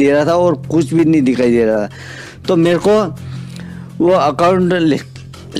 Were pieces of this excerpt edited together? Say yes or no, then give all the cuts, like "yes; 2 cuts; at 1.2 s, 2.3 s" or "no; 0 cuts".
no; 0 cuts